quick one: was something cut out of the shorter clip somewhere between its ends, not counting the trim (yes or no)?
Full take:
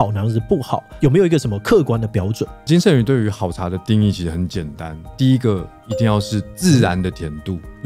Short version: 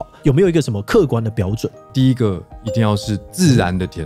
yes